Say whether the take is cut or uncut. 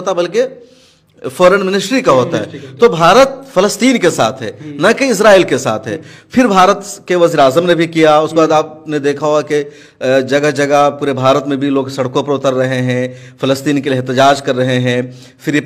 uncut